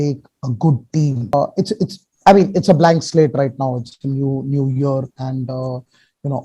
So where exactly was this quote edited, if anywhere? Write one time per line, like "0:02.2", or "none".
0:01.3